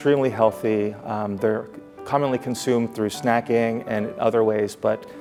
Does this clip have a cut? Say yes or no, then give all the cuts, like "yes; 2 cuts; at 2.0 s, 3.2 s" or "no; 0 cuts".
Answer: no; 0 cuts